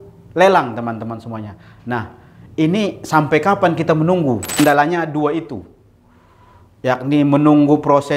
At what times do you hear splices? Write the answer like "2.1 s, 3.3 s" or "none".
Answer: 4.6 s